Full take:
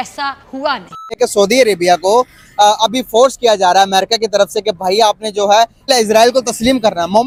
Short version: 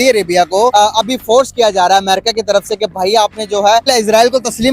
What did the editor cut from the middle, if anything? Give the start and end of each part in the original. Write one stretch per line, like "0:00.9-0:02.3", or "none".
0:02.2-0:02.6
0:05.7-0:05.9